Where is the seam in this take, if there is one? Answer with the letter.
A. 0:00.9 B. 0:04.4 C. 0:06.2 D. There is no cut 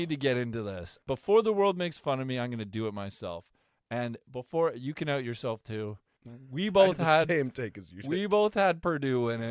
A